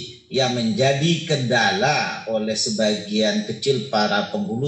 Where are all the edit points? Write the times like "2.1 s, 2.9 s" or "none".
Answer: none